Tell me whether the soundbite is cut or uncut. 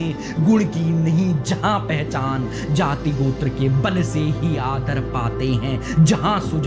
uncut